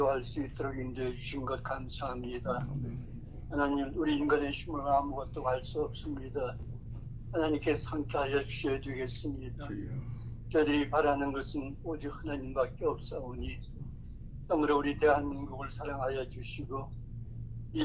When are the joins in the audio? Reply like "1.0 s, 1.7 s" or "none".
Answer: none